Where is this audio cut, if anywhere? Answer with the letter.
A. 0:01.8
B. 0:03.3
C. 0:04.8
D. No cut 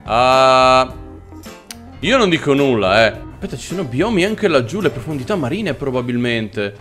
B